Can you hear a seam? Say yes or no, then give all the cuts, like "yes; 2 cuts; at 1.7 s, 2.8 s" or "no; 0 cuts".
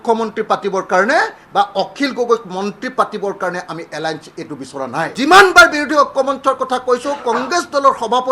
yes; 1 cut; at 5.1 s